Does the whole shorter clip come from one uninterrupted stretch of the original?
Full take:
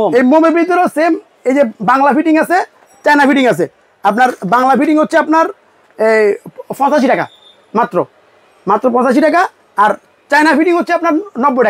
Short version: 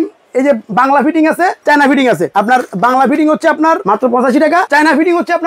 no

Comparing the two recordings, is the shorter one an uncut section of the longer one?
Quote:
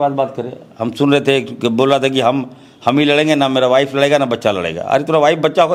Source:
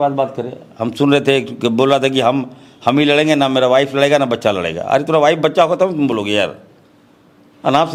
yes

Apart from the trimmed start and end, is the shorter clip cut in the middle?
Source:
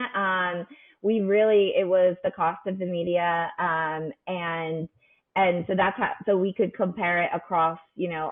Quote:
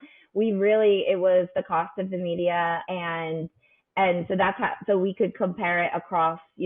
yes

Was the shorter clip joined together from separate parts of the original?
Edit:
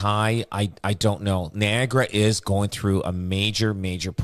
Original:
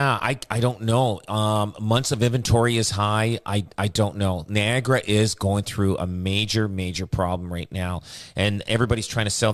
no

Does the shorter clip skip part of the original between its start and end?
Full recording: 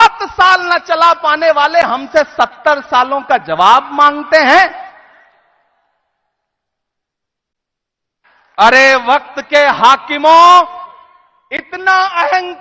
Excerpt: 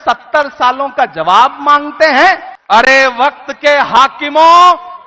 yes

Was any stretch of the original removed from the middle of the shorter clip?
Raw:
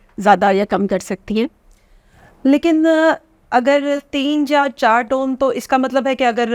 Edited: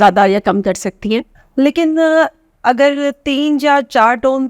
yes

